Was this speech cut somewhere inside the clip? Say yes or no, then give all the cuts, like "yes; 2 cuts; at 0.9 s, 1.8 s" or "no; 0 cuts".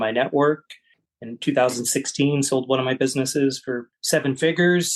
yes; 1 cut; at 3.9 s